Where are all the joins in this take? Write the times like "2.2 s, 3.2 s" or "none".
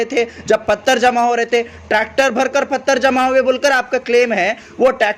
none